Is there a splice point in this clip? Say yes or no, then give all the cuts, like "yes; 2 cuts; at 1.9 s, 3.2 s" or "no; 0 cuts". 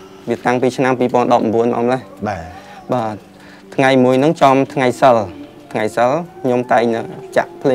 no; 0 cuts